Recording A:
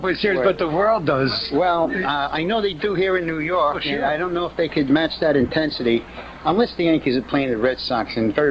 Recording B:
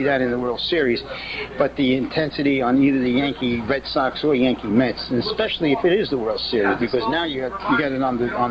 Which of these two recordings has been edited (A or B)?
A